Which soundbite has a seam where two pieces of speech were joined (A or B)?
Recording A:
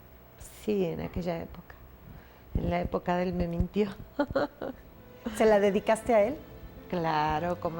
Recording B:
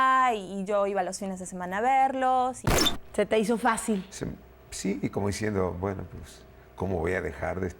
B